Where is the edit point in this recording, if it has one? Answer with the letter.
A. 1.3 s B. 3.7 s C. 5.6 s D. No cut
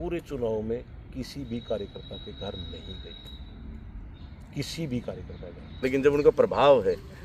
C